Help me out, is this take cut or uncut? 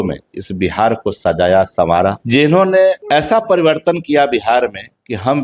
cut